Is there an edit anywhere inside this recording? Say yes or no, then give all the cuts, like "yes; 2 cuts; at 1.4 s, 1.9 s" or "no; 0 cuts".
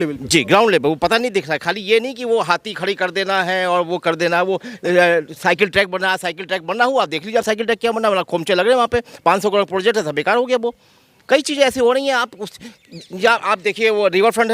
no; 0 cuts